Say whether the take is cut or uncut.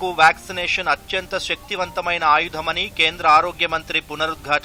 uncut